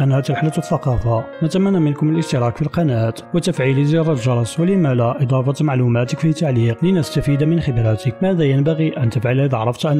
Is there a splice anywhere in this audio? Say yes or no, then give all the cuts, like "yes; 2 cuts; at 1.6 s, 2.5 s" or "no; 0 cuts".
yes; 4 cuts; at 1.3 s, 3.2 s, 6.7 s, 8.1 s